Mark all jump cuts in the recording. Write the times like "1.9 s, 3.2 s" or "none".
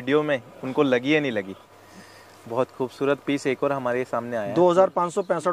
1.5 s